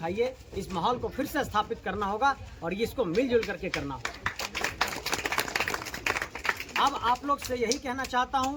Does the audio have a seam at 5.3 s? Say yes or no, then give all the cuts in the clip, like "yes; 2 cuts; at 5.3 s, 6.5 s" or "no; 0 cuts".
no; 0 cuts